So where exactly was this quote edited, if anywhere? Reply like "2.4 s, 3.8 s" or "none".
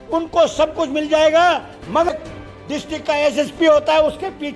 2.1 s